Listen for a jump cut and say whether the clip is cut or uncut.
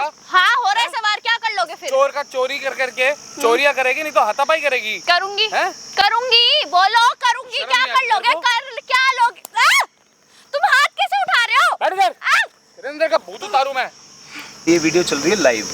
cut